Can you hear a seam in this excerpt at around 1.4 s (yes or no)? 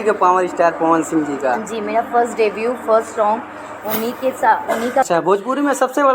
no